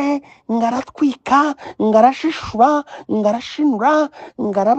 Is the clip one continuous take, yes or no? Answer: yes